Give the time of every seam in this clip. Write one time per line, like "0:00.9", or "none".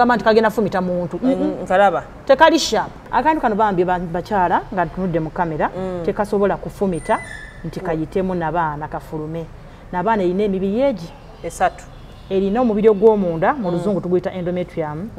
0:03.0